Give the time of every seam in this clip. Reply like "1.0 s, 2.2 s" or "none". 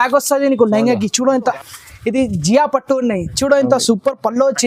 1.6 s